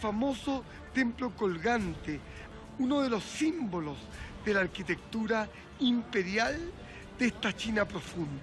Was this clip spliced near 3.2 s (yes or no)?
no